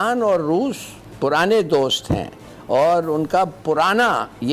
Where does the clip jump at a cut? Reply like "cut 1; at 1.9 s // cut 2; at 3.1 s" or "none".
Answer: none